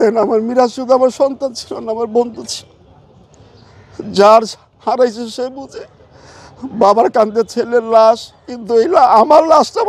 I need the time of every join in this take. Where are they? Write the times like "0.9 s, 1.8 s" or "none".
none